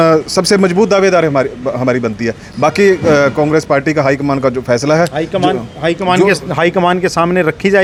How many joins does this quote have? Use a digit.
0